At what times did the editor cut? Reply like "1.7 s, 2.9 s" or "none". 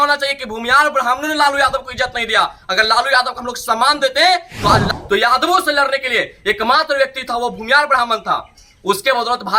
4.9 s